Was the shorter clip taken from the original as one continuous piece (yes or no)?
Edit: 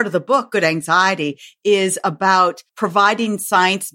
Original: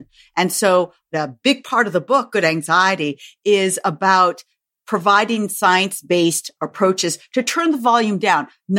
no